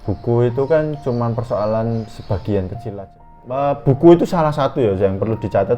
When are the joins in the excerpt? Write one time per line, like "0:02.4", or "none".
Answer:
0:02.8